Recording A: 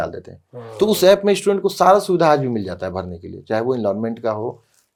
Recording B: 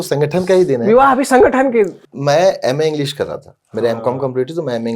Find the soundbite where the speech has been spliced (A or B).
B